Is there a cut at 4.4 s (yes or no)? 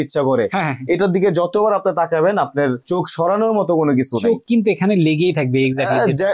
no